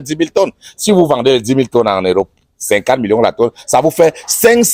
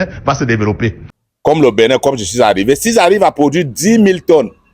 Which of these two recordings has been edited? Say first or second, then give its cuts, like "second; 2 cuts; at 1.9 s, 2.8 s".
second; 1 cut; at 1.1 s